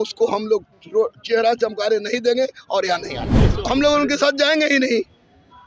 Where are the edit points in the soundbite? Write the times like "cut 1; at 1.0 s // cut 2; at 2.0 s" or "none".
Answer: cut 1; at 3.3 s